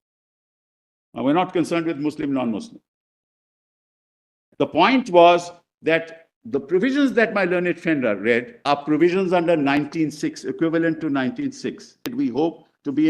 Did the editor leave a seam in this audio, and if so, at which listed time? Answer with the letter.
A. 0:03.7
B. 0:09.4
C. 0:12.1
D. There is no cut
C